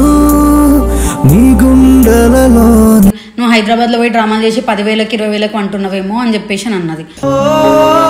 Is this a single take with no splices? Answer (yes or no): no